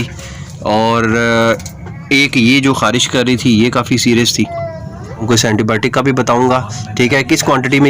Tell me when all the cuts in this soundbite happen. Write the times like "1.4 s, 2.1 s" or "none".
5.2 s

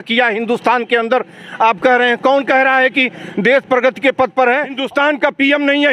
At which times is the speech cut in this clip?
4.8 s

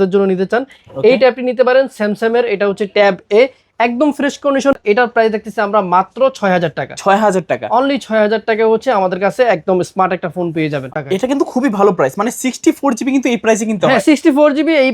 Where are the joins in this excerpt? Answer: 4.8 s, 11.0 s

